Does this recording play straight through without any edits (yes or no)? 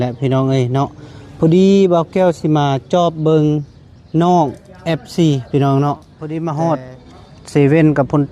no